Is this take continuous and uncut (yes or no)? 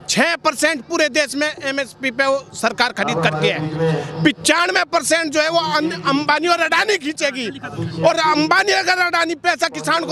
yes